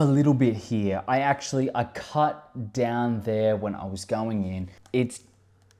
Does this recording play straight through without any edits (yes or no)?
no